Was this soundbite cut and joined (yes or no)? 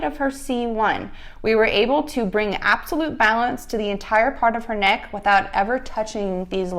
no